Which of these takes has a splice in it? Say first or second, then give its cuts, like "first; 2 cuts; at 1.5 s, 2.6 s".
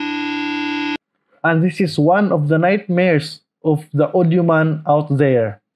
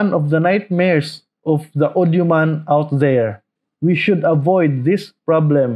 first; 1 cut; at 0.9 s